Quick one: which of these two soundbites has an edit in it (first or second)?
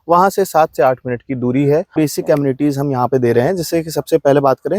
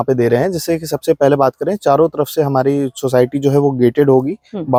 first